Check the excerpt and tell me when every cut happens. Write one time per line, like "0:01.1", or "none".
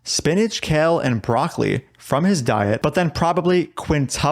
none